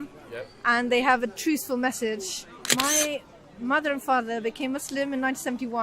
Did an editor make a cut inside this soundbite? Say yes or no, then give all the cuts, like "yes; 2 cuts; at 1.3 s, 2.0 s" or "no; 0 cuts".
yes; 1 cut; at 2.6 s